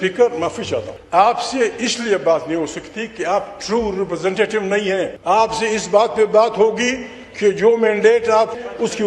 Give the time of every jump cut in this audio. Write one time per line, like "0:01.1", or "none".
0:00.9
0:05.2